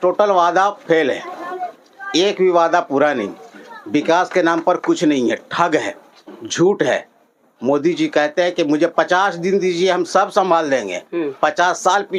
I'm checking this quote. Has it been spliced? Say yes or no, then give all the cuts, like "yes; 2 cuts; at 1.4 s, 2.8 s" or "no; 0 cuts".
no; 0 cuts